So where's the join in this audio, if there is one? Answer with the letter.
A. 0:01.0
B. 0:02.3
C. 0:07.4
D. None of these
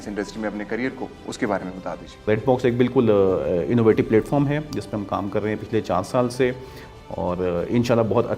B